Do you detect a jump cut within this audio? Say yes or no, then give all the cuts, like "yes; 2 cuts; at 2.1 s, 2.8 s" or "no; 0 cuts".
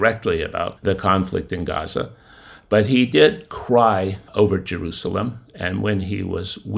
no; 0 cuts